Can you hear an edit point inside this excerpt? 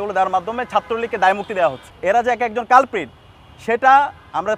yes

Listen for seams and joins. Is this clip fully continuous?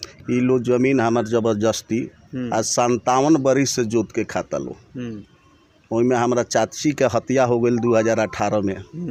yes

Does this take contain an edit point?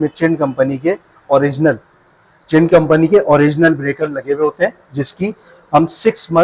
no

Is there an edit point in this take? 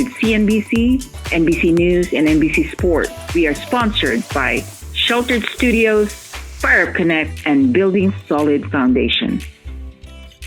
yes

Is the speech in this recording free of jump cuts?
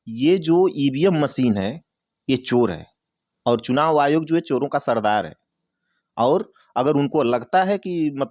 yes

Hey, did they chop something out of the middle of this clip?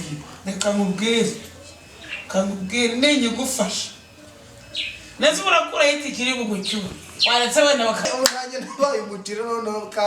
yes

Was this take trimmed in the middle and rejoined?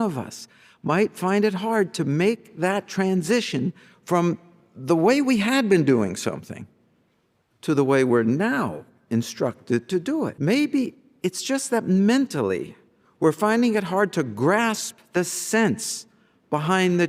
yes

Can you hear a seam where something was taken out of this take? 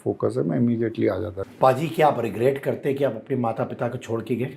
yes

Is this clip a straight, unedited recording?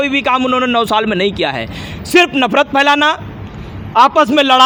yes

